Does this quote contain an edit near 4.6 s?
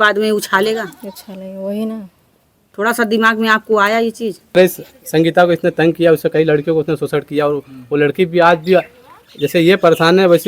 yes; 1 cut; at 4.6 s

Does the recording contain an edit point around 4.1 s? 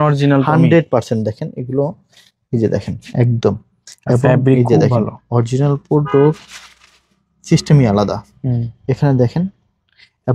no; 0 cuts

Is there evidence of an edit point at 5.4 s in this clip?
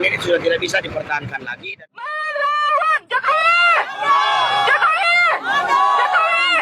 no; 1 cut; at 1.7 s

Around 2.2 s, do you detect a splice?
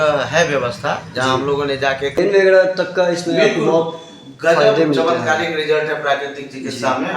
yes; 1 cut; at 2.2 s

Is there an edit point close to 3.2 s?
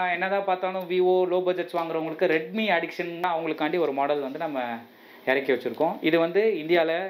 yes; 1 cut; at 3.2 s

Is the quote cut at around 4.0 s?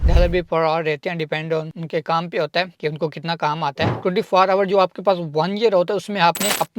no; 0 cuts

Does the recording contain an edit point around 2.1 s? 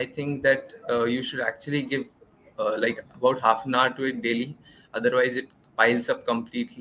no; 0 cuts

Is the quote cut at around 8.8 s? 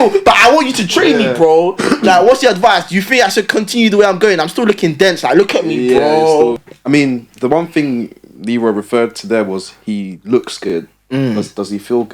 no; 1 cut; at 6.6 s

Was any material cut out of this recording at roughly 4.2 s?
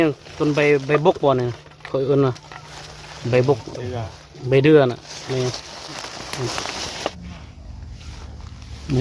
no; 1 cut; at 7.1 s

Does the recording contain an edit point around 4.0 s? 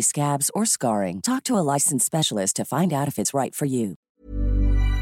yes; 1 cut; at 4.0 s

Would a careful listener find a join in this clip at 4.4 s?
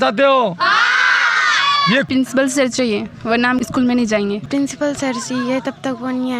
yes; 2 cuts; at 2.1 s, 4.4 s

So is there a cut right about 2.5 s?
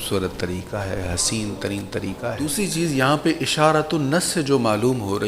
yes; 1 cut; at 2.5 s

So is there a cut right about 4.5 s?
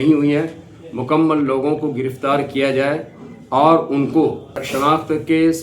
yes; 1 cut; at 4.5 s

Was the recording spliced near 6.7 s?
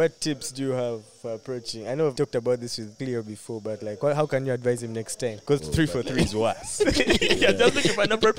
no; 3 cuts; at 2.1 s, 2.9 s, 5.4 s

